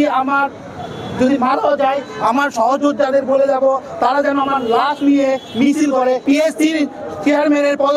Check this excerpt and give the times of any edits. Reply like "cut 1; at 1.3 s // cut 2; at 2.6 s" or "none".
cut 1; at 6.2 s

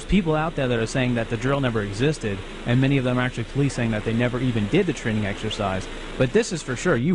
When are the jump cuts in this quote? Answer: cut 1; at 3.5 s

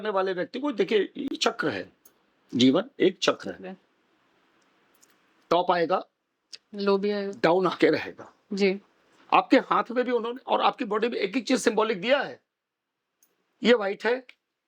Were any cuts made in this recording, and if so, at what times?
none

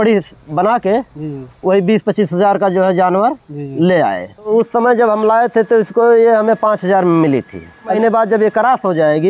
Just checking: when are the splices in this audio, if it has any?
cut 1; at 4.5 s // cut 2; at 8.0 s

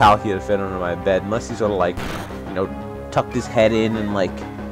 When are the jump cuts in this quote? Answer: none

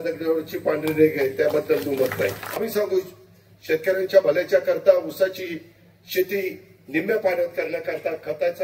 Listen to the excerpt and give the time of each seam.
cut 1; at 2.6 s

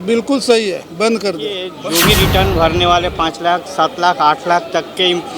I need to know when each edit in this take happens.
cut 1; at 1.7 s

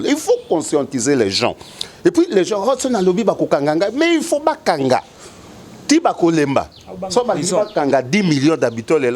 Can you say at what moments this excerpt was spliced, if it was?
none

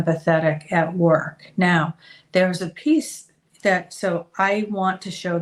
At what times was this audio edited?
none

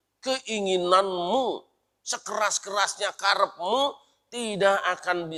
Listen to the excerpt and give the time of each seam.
none

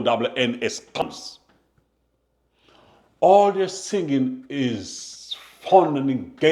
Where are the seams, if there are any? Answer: cut 1; at 0.9 s

